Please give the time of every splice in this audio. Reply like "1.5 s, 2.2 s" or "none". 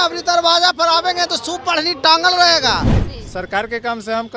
3.0 s